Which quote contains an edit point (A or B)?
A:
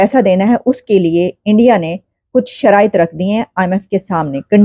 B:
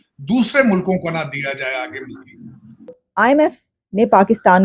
B